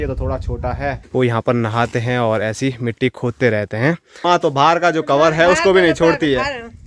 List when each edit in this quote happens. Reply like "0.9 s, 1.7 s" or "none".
1.0 s, 4.2 s